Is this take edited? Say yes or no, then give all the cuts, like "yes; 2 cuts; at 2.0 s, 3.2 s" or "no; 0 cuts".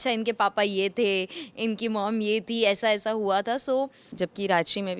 yes; 1 cut; at 4.0 s